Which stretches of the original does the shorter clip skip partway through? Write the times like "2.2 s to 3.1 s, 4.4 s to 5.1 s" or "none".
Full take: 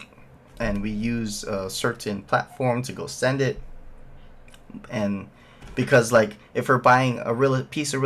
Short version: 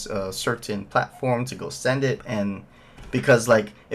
3.6 s to 4.9 s